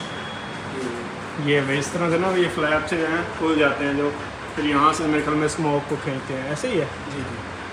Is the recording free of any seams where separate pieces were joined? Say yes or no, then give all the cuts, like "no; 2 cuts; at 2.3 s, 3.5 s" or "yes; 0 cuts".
yes; 0 cuts